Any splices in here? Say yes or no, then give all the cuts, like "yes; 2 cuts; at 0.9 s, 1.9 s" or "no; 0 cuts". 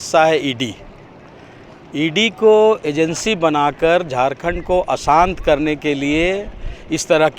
no; 0 cuts